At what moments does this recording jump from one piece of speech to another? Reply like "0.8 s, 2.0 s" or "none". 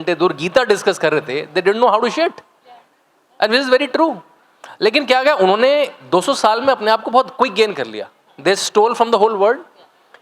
none